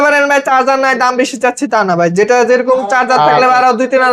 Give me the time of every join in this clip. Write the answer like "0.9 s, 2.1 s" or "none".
none